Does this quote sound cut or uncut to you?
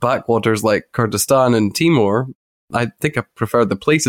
cut